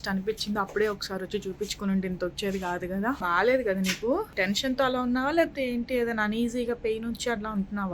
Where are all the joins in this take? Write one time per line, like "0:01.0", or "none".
0:03.2
0:04.3